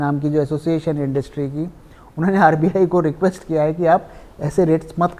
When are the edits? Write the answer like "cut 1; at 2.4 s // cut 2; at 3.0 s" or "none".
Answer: none

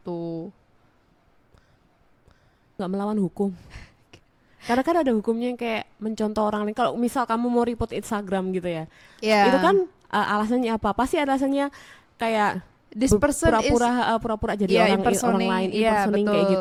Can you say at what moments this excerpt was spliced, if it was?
none

